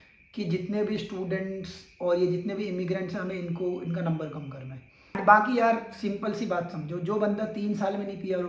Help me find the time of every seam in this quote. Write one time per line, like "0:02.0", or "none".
0:05.2